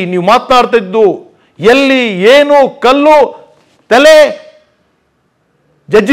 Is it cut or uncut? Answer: uncut